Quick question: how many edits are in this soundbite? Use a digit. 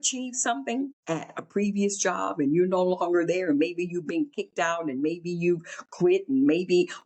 1